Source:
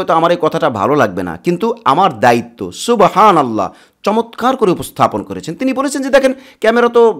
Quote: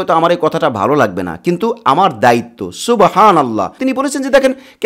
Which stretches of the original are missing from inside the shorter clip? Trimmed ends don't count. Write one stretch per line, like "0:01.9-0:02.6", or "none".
0:03.7-0:05.5